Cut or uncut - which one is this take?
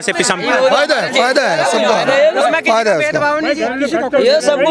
uncut